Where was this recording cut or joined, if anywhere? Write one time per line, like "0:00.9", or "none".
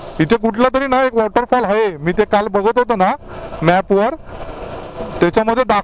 none